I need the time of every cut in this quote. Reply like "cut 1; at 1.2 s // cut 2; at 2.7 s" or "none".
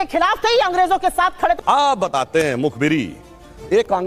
cut 1; at 1.5 s